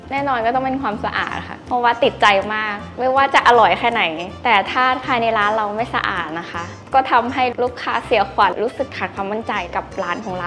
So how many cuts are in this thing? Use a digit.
3